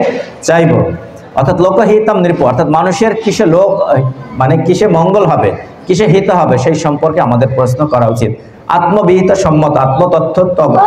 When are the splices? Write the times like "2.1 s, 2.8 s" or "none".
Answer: none